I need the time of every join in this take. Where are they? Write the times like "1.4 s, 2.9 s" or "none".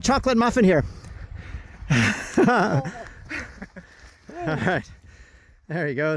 none